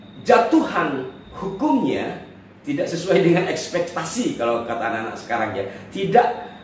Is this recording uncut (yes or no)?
yes